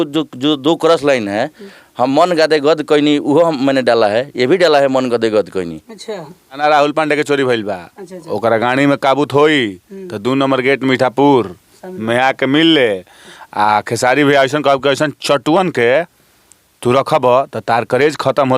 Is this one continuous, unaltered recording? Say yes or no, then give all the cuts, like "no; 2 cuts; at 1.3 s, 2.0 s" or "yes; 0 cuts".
no; 1 cut; at 6.6 s